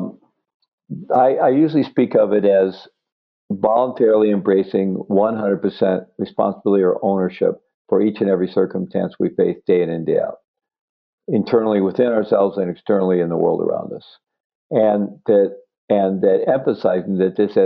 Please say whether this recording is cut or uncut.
uncut